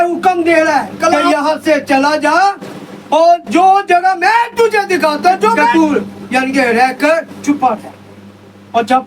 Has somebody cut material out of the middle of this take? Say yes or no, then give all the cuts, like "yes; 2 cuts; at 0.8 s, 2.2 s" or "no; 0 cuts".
yes; 3 cuts; at 1.2 s, 5.7 s, 7.3 s